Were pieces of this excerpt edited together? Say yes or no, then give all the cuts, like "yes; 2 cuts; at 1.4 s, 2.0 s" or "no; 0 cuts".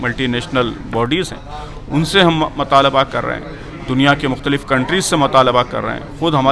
no; 0 cuts